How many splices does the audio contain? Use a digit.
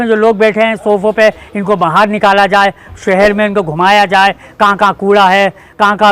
0